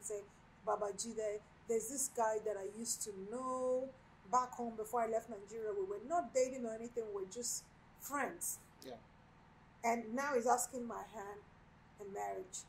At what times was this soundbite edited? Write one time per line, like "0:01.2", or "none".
none